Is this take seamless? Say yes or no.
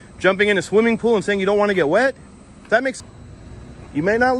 no